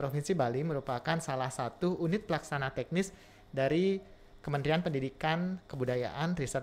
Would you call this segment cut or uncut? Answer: uncut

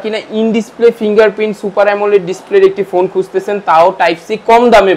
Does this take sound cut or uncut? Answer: uncut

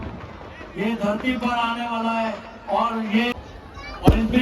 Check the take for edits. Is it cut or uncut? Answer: cut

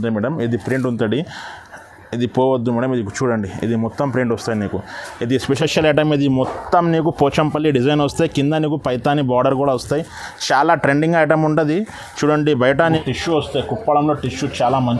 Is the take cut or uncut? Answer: cut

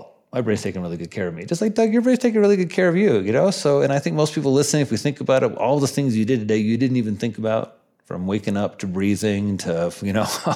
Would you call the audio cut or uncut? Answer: uncut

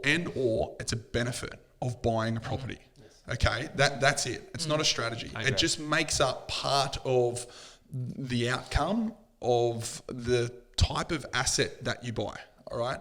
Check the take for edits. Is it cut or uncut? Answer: uncut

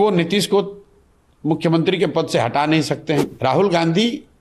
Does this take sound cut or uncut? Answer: cut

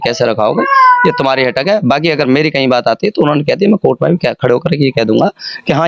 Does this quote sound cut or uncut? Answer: uncut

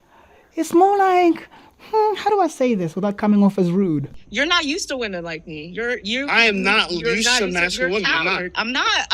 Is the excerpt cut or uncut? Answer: cut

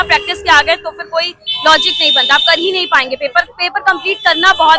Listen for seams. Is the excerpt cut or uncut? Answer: uncut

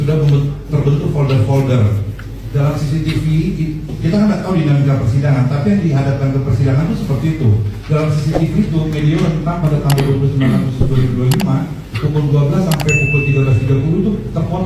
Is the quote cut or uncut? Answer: uncut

